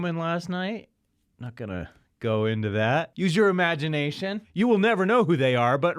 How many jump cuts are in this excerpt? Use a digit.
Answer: 2